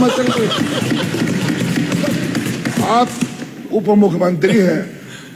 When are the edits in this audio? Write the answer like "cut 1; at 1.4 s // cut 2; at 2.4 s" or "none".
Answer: none